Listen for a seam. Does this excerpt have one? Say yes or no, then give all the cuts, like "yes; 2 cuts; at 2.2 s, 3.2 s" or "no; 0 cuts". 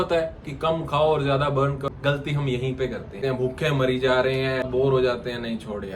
yes; 3 cuts; at 1.9 s, 3.2 s, 4.7 s